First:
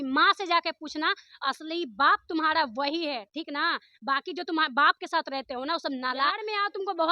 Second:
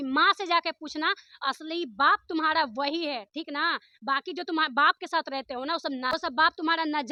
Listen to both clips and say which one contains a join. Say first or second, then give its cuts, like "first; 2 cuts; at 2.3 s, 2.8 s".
first; 1 cut; at 6.2 s